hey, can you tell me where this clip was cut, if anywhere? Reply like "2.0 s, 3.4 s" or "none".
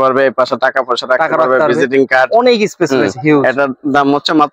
none